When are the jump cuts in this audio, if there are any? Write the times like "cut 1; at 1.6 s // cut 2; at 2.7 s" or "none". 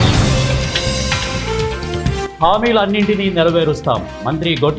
cut 1; at 2.2 s